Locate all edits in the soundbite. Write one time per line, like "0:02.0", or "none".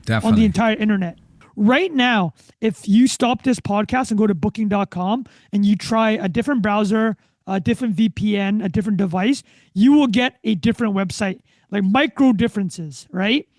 0:01.4